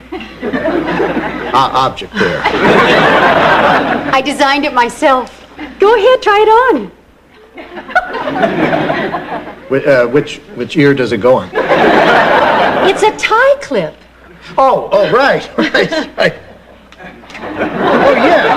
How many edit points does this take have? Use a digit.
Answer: 1